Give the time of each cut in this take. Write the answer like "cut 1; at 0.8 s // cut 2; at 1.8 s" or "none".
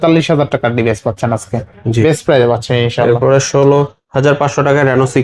none